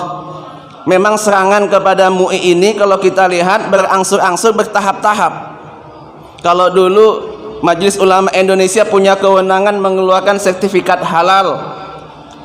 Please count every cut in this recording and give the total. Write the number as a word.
one